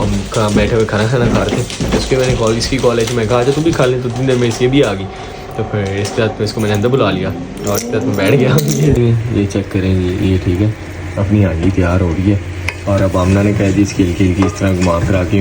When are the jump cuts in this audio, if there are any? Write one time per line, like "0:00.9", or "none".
0:09.0